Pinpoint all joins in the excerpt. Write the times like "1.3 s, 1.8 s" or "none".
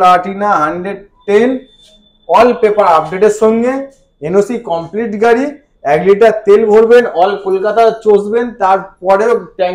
none